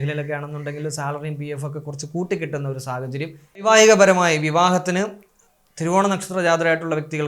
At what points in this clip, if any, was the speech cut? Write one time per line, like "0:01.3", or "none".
0:03.6